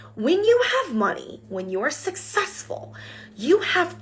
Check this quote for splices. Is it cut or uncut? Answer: uncut